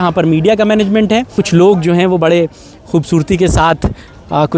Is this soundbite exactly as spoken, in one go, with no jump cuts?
no; 1 cut; at 1.3 s

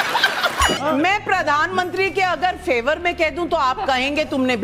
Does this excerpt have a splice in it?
yes; 2 cuts; at 0.8 s, 1.7 s

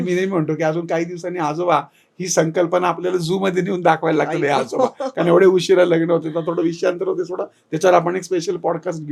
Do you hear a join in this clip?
no; 0 cuts

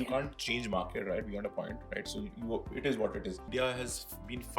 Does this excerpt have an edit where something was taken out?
yes; 1 cut; at 3.5 s

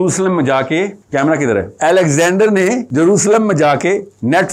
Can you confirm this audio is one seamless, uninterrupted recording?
no; 3 cuts; at 1.0 s, 1.7 s, 2.8 s

